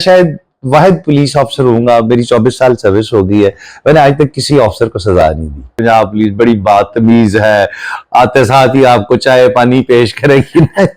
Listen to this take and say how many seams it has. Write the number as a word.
one